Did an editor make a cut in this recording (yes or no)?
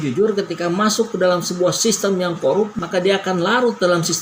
no